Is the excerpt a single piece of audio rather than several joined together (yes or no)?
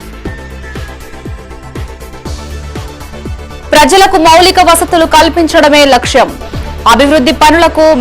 no